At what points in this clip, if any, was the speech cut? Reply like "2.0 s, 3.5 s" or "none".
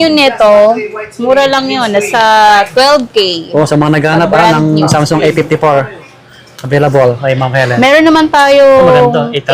none